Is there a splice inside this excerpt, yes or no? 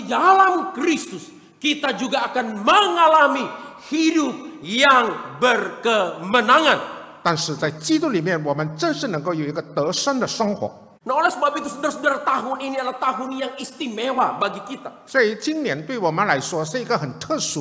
yes